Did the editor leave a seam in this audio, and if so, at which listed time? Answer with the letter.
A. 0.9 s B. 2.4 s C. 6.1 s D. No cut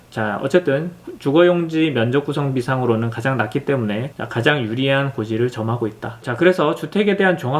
C